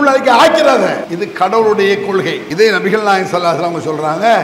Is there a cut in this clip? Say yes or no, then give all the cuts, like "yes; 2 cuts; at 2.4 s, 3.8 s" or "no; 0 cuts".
yes; 2 cuts; at 1.1 s, 2.4 s